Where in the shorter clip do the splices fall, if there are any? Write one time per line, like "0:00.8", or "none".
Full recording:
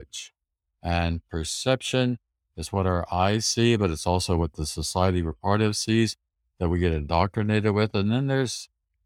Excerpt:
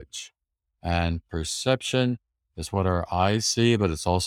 none